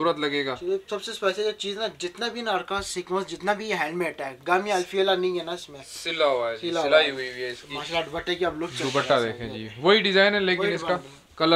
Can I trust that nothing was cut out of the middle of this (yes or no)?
yes